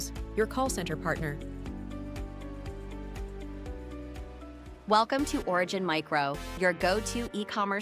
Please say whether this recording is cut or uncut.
cut